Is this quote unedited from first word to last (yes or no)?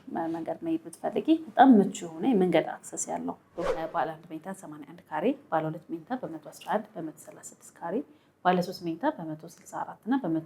no